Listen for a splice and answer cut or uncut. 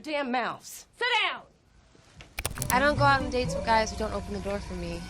cut